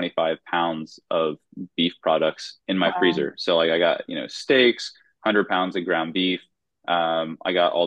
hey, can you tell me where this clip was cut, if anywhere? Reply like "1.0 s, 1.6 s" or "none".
none